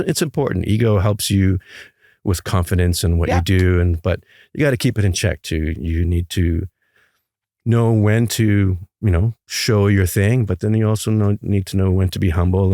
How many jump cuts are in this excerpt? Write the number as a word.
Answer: zero